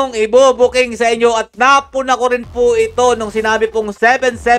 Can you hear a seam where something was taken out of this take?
no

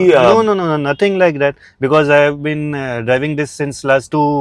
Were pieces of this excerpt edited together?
no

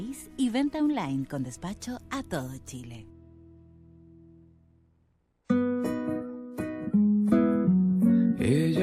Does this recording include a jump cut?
yes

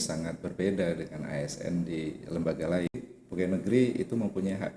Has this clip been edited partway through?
yes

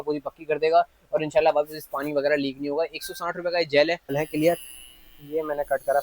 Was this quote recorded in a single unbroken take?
no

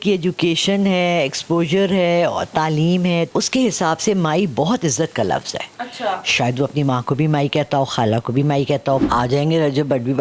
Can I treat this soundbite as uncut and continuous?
no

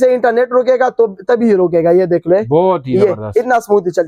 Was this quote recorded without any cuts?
yes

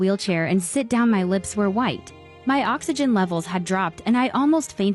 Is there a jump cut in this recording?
no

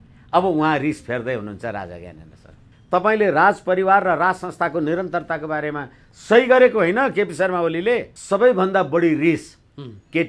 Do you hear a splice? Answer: yes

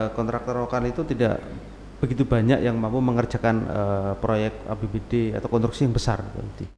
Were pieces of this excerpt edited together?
no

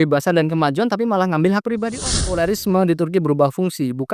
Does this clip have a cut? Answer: yes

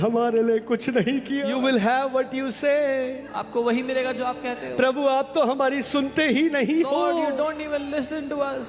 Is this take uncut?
no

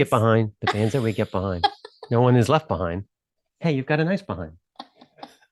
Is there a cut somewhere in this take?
no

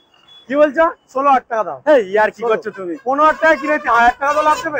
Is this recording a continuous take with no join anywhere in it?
yes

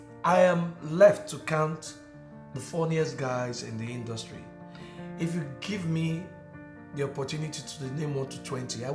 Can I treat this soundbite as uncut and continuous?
yes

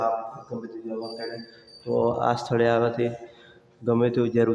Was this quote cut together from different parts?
no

